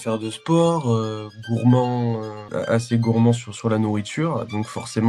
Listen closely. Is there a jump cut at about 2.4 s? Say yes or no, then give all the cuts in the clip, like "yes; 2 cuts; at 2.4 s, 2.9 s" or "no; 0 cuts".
yes; 1 cut; at 2.4 s